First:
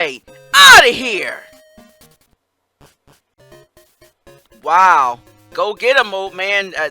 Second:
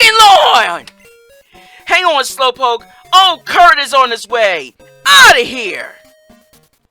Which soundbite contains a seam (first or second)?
first